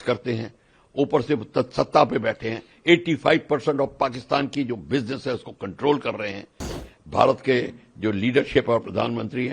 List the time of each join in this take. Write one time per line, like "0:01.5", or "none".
0:06.9

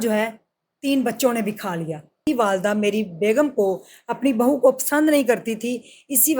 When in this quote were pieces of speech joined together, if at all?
0:02.2

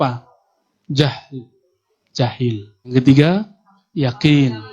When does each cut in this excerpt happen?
0:02.9

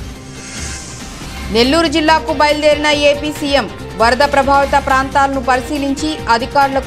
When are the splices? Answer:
0:01.0

